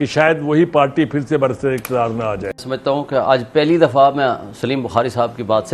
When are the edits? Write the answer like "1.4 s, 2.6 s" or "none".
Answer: 2.6 s